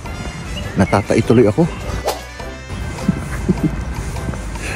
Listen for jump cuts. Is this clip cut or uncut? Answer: cut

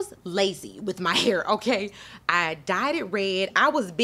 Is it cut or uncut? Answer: uncut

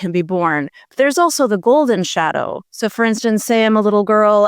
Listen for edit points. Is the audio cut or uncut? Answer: uncut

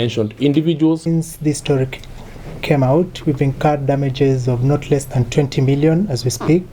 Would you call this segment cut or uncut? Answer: cut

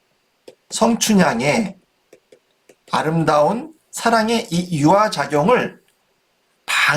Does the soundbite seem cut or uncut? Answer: uncut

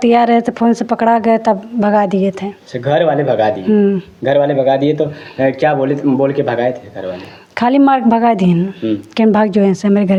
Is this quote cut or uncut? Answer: uncut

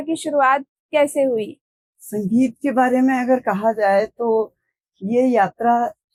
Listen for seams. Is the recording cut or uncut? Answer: uncut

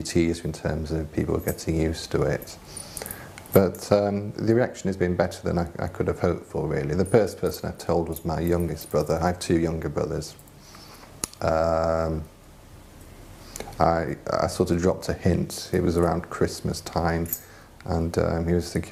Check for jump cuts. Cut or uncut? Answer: uncut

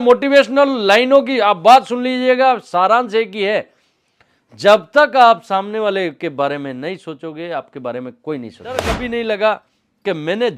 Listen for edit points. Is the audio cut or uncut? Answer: cut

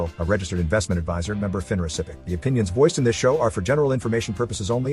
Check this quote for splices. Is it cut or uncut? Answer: cut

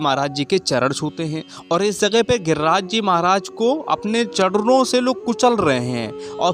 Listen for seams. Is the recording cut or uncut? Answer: cut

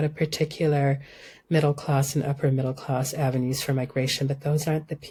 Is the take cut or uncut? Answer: uncut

